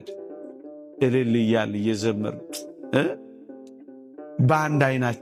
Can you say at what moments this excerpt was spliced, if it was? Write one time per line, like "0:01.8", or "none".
none